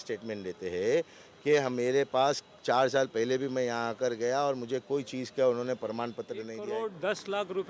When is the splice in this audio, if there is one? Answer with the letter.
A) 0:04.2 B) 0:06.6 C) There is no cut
B